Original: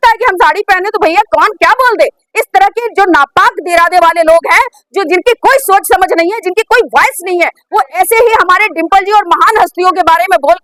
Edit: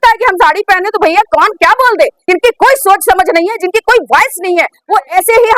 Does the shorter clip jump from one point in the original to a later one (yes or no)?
yes